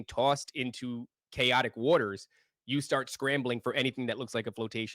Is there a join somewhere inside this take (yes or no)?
no